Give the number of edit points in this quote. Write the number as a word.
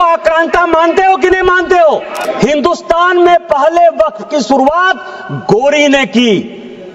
one